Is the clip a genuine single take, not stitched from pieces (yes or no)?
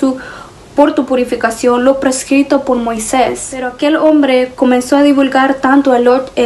no